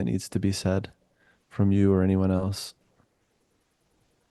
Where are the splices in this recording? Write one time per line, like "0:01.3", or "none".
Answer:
none